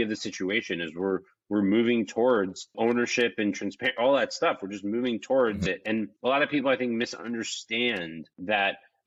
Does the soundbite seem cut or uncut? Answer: uncut